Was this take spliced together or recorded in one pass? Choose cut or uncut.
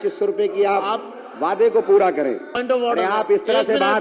cut